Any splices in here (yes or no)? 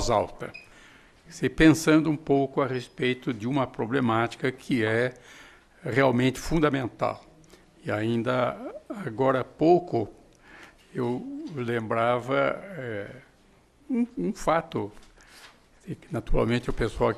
no